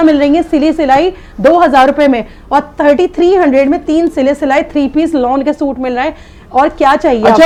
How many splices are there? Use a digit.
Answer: 0